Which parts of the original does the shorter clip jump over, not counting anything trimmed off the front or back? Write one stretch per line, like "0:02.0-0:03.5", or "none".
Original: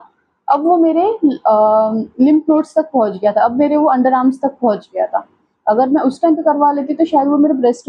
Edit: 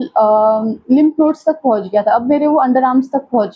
none

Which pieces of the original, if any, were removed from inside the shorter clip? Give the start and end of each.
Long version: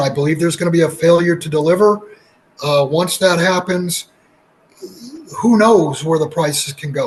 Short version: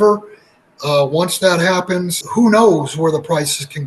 0:04.0-0:05.3

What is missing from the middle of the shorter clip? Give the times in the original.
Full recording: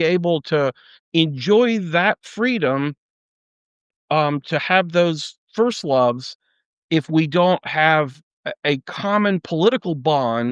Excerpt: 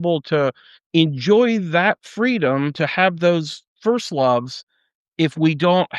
0:02.9-0:04.5

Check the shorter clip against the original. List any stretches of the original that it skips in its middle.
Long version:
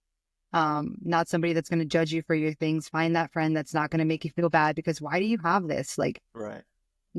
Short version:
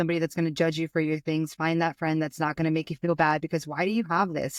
none

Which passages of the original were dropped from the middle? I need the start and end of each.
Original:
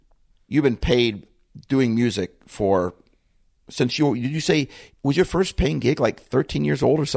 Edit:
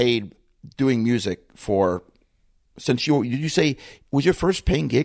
none

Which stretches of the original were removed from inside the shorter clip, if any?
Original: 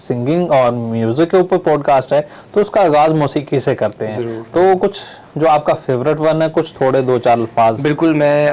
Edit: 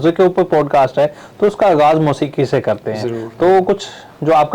none

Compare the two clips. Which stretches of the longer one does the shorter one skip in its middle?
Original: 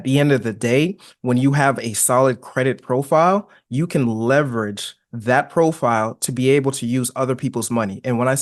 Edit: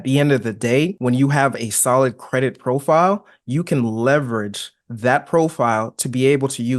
0:01.0-0:01.2

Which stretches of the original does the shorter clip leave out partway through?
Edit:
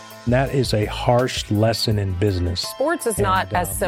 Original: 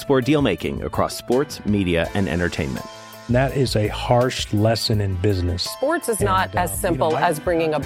none

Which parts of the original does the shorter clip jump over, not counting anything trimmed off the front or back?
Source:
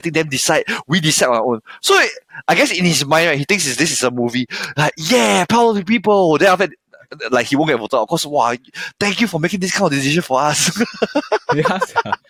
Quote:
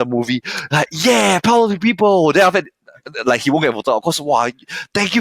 none

